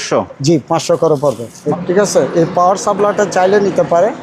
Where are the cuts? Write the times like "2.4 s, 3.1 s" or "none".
1.5 s